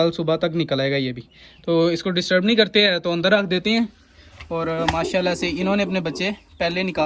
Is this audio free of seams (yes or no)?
yes